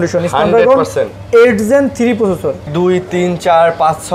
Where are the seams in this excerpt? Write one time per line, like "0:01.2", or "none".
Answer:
0:02.7